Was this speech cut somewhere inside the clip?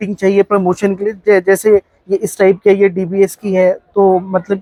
no; 0 cuts

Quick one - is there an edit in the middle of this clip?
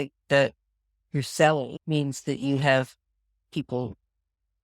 yes; 1 cut; at 1.8 s

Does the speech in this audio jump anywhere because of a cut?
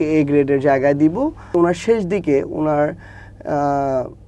yes; 1 cut; at 1.5 s

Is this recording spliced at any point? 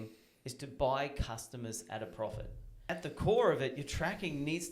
yes; 1 cut; at 2.9 s

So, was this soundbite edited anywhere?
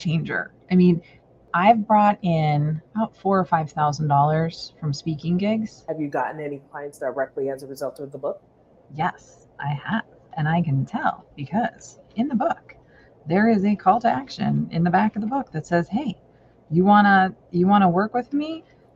yes; 3 cuts; at 1.4 s, 2.8 s, 5.8 s

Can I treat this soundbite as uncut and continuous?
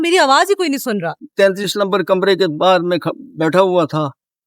no; 1 cut; at 1.2 s

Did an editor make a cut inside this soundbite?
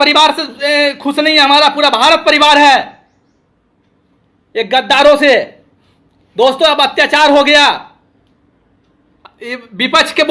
no; 0 cuts

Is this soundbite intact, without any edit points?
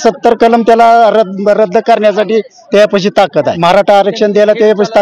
no; 1 cut; at 3.6 s

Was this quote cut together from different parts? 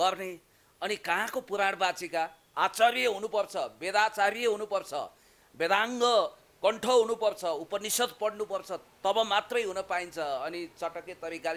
no; 0 cuts

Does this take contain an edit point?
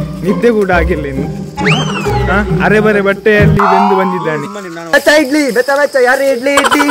yes; 1 cut; at 4.9 s

